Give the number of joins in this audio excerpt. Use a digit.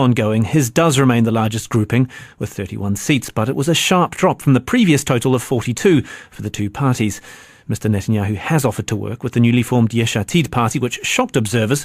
1